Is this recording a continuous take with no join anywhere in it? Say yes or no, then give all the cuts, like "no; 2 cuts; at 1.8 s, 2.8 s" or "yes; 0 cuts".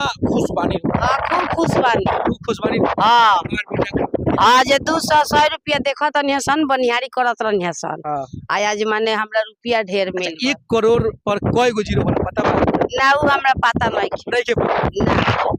yes; 0 cuts